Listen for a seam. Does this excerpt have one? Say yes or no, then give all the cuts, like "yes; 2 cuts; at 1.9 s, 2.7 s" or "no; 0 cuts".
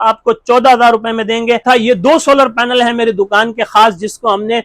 yes; 1 cut; at 1.6 s